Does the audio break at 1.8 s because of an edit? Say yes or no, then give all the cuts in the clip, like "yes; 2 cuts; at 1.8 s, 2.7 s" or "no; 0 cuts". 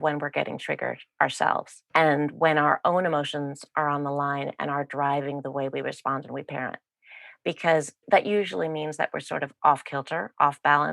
yes; 2 cuts; at 1.8 s, 8.0 s